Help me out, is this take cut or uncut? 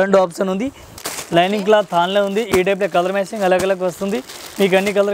cut